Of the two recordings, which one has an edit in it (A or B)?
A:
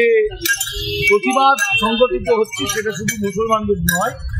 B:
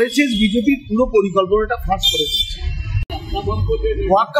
B